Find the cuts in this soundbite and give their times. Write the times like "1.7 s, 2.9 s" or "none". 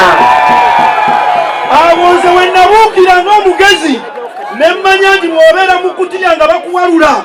none